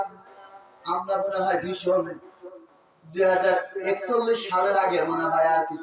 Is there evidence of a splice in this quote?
no; 0 cuts

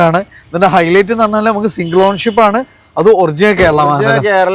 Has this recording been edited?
no; 0 cuts

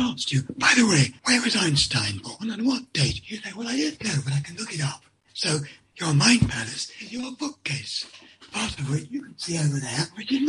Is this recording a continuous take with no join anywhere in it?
no; 1 cut; at 1.2 s

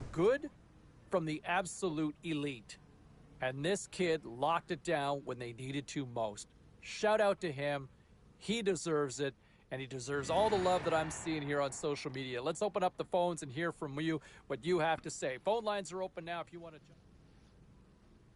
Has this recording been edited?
yes; 1 cut; at 16.8 s

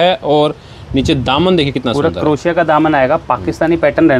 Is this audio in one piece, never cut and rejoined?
yes; 0 cuts

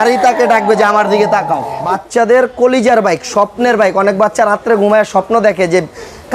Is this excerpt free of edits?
no; 1 cut; at 1.8 s

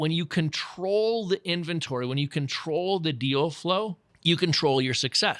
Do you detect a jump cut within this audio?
yes; 1 cut; at 4.1 s

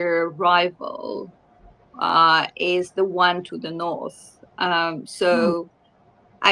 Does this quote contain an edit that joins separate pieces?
no; 0 cuts

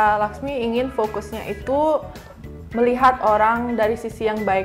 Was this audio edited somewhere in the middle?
no; 0 cuts

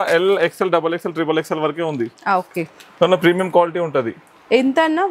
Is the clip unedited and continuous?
yes; 0 cuts

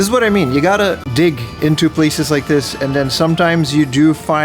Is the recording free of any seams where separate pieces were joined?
no; 1 cut; at 1.0 s

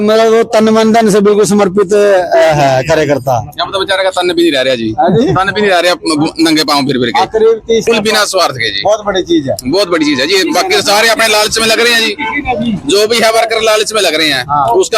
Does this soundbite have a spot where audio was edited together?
yes; 1 cut; at 7.8 s

